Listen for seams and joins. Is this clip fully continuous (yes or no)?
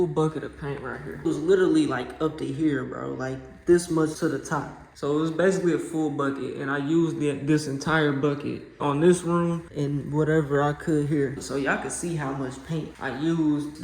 no